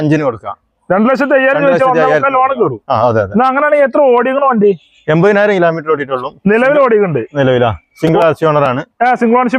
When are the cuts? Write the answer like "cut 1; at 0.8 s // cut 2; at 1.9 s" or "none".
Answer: none